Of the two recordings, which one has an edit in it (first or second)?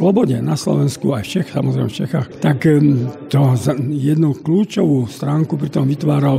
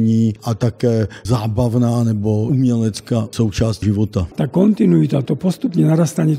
second